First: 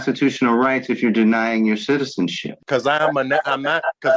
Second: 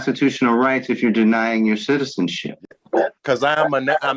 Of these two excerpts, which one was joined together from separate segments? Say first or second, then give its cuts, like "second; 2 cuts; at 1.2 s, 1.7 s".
first; 1 cut; at 2.6 s